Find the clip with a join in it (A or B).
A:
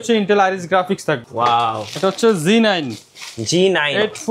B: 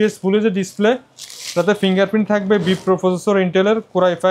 A